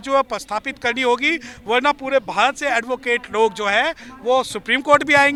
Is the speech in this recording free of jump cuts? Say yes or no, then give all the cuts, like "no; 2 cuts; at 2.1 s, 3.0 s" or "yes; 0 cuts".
yes; 0 cuts